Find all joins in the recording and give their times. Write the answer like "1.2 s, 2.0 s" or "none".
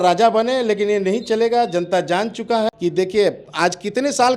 2.7 s